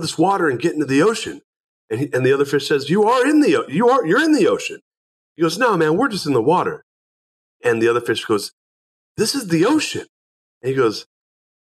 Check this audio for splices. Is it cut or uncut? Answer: cut